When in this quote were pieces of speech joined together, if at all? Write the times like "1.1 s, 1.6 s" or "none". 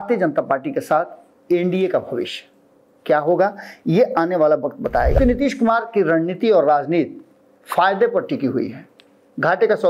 5.2 s